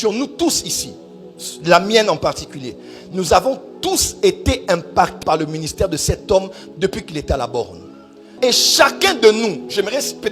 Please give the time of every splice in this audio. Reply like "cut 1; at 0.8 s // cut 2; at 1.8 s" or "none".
cut 1; at 8.2 s